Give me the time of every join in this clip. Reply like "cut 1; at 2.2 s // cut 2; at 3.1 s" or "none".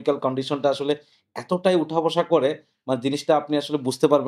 none

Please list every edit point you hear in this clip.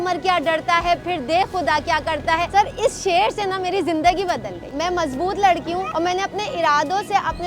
cut 1; at 4.6 s

